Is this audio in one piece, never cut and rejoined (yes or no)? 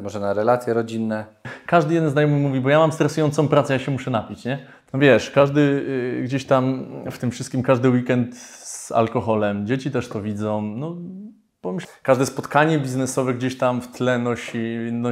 no